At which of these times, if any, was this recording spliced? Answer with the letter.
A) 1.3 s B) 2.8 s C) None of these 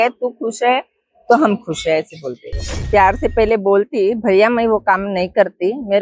B